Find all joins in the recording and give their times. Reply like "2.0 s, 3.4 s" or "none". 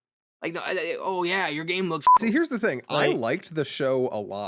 2.1 s